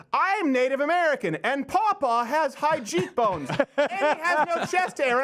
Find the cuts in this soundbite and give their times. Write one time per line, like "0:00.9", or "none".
none